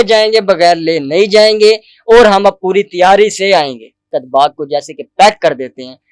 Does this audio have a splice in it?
yes; 1 cut; at 4.2 s

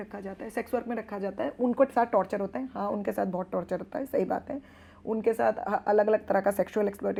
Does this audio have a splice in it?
no; 0 cuts

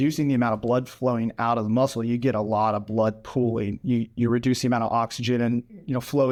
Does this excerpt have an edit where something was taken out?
no; 0 cuts

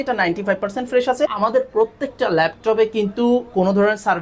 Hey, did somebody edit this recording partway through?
yes; 1 cut; at 1.3 s

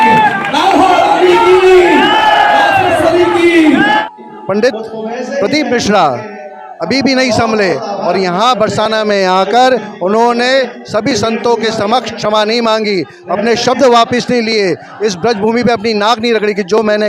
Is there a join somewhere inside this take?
yes; 1 cut; at 4.2 s

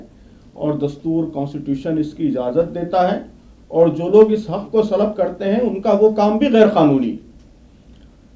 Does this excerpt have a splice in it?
no; 0 cuts

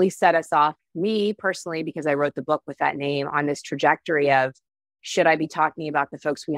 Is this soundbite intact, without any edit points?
yes; 0 cuts

